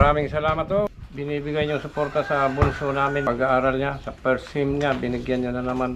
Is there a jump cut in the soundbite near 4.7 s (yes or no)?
no